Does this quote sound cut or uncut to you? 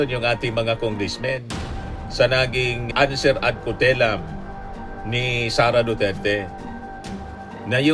uncut